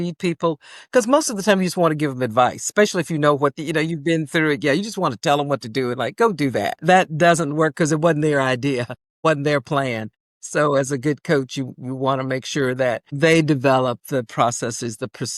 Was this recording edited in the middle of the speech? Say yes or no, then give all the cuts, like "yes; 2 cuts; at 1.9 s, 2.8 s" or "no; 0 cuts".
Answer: yes; 2 cuts; at 3.6 s, 6.8 s